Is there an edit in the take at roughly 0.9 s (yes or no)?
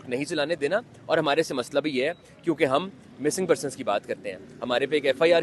no